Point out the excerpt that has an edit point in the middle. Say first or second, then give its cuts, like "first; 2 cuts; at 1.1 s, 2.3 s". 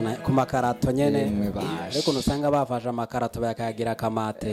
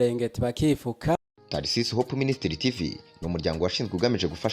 second; 1 cut; at 1.2 s